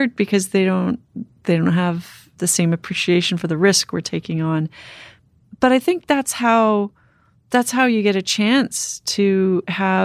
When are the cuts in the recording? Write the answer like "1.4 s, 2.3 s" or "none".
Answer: none